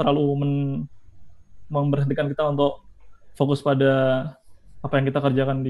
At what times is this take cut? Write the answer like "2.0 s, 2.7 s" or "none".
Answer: none